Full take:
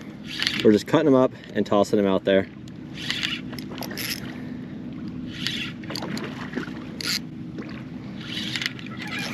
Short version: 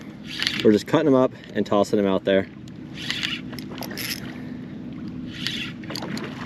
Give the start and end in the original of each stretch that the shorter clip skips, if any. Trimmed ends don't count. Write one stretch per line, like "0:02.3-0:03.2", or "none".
none